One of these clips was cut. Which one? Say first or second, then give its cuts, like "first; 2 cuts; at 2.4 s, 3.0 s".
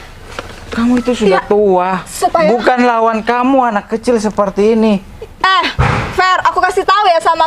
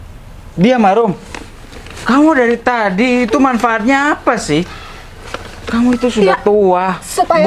first; 1 cut; at 5.2 s